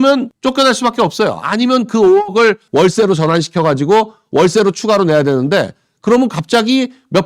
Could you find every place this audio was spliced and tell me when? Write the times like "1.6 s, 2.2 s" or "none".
2.6 s